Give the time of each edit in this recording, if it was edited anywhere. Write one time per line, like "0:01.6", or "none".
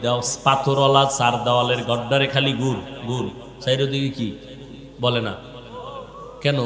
none